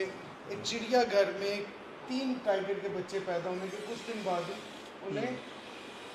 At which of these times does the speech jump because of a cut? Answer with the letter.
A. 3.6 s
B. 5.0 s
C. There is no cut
C